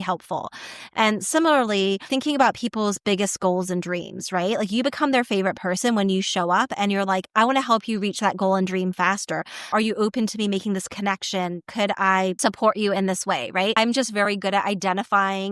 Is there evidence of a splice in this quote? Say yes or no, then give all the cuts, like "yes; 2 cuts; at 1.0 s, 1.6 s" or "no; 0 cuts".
yes; 4 cuts; at 2.1 s, 9.7 s, 12.4 s, 13.7 s